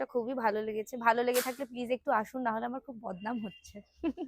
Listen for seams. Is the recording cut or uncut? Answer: uncut